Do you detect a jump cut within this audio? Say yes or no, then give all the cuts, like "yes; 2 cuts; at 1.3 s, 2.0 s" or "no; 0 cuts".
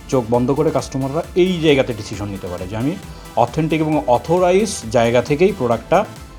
no; 0 cuts